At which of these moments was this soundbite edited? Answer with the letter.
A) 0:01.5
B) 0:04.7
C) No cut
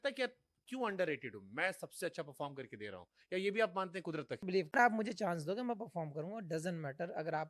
B